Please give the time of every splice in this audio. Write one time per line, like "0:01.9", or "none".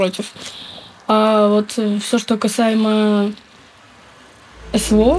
none